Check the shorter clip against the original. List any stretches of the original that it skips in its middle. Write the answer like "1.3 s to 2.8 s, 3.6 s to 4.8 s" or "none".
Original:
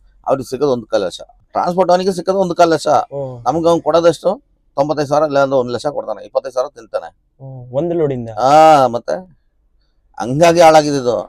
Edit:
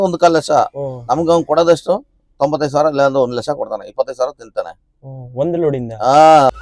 none